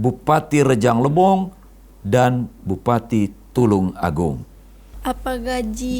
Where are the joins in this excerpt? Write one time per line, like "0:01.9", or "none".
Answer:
0:04.9